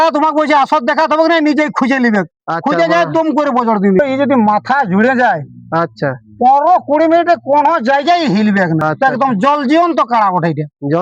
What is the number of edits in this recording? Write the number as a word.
two